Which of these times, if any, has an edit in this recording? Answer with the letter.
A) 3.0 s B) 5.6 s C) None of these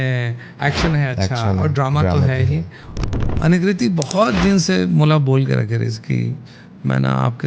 A